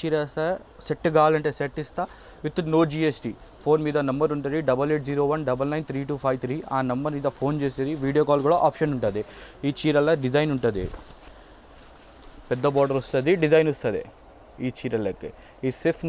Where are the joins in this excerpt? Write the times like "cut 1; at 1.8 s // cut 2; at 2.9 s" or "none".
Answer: none